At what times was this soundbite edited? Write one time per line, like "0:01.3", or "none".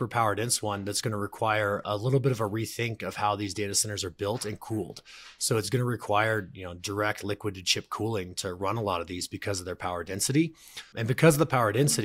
0:01.8
0:10.9